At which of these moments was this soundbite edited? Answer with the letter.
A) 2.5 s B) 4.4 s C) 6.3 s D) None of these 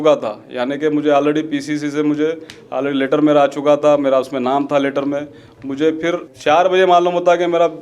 C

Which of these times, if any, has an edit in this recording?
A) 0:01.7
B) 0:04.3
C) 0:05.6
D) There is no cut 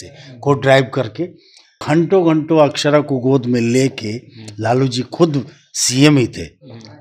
A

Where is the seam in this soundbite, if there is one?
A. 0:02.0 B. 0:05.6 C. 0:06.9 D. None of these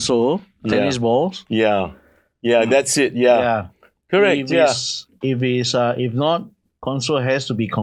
D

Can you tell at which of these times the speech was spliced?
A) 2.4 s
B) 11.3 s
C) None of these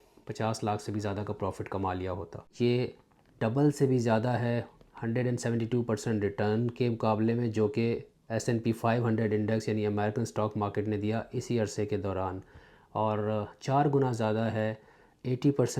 A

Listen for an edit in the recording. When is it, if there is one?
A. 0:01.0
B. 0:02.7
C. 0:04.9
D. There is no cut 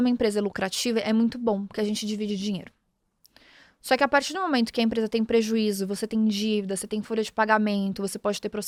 D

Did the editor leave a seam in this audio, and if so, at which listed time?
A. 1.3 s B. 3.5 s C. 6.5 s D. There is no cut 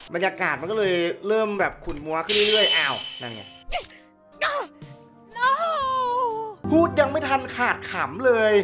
C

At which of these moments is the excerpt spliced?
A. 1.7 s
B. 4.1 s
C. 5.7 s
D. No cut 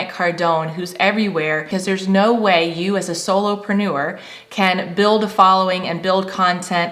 A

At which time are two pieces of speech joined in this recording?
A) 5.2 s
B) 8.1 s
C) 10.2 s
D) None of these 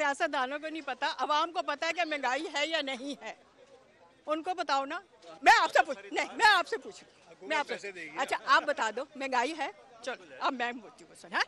D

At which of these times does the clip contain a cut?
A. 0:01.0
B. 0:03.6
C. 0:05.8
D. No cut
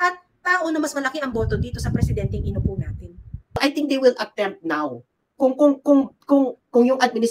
B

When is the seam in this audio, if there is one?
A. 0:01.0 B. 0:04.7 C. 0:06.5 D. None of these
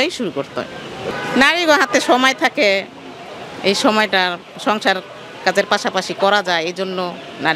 A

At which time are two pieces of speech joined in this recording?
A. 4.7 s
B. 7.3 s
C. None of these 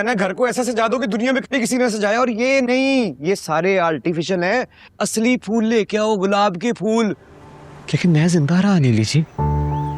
B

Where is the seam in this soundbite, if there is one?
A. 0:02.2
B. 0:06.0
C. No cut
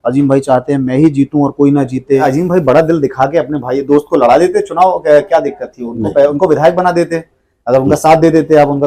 A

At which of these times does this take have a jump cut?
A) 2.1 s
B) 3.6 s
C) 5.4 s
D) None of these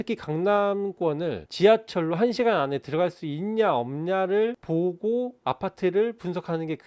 D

